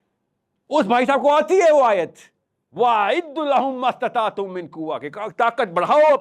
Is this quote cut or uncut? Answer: uncut